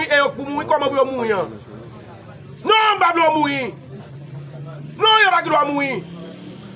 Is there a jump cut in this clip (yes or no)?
no